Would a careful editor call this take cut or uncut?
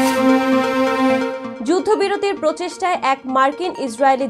uncut